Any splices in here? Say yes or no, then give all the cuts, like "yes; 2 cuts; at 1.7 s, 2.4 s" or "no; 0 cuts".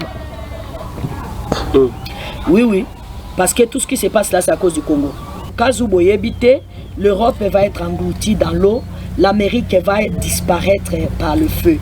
yes; 1 cut; at 5.5 s